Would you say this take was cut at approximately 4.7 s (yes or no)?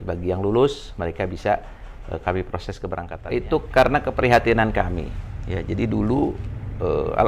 no